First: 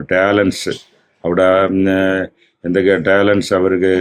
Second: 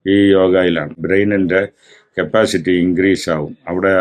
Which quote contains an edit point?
second; 1 cut; at 1.0 s

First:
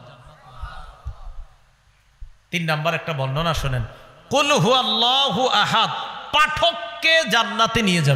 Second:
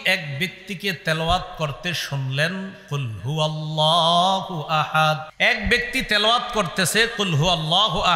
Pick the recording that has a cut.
second; 1 cut; at 5.3 s

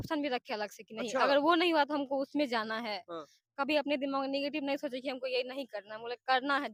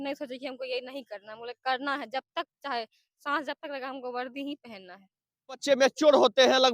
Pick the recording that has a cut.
second; 1 cut; at 5.6 s

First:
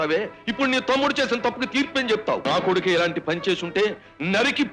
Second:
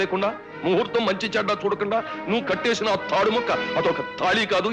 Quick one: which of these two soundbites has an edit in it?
first; 1 cut; at 2.4 s

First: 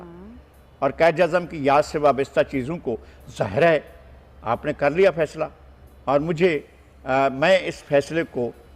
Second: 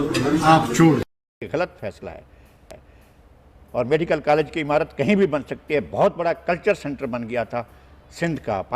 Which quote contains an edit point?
second; 1 cut; at 1.4 s

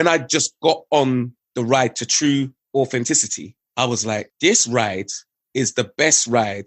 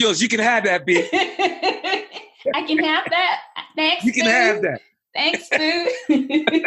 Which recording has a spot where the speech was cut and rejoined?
first; 2 cuts; at 1.4 s, 2.6 s

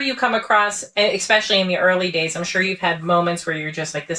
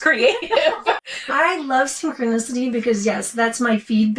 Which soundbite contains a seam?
second; 1 cut; at 1.0 s

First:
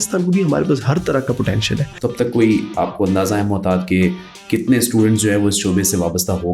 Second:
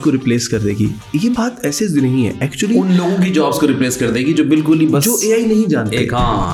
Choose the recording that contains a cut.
first; 1 cut; at 1.9 s

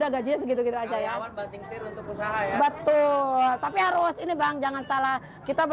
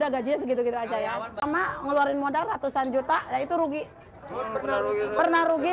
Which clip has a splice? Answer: second; 1 cut; at 1.4 s

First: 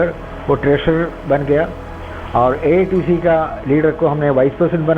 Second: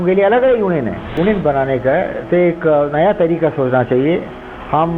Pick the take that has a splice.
second; 1 cut; at 1.2 s

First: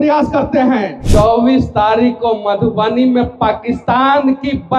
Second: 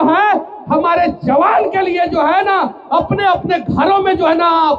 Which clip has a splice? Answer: first; 1 cut; at 1.0 s

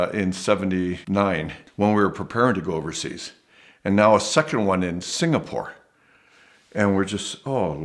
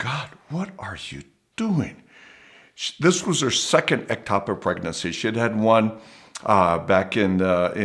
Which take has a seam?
first; 1 cut; at 1.1 s

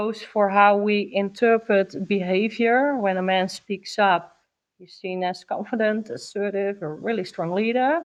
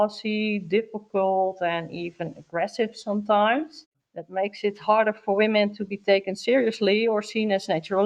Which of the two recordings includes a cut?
second; 1 cut; at 3.9 s

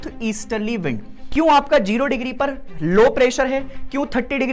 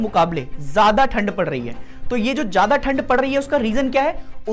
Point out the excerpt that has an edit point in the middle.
first; 1 cut; at 1.2 s

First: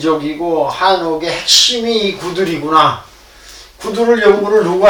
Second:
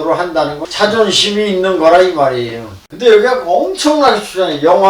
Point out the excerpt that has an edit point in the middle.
second; 1 cut; at 2.9 s

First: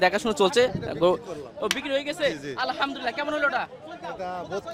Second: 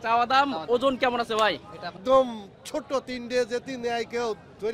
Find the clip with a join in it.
second; 1 cut; at 2.0 s

